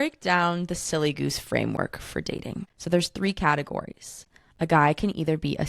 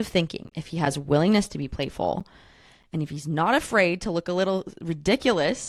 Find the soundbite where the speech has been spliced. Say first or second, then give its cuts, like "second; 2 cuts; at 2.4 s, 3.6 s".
first; 1 cut; at 2.7 s